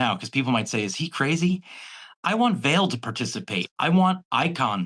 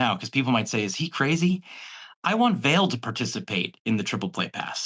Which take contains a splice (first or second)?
first